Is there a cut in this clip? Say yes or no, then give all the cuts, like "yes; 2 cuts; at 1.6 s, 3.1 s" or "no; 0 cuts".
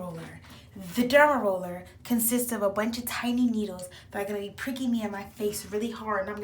no; 0 cuts